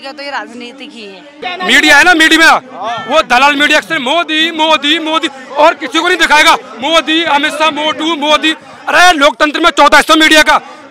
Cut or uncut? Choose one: cut